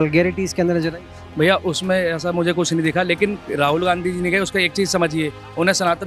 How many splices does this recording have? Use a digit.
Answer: 0